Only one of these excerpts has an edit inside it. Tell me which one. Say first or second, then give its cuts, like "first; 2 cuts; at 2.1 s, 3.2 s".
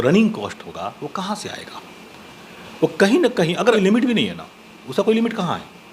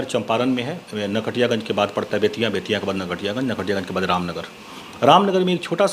first; 1 cut; at 3.7 s